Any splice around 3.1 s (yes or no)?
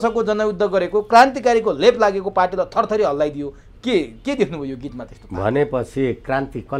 no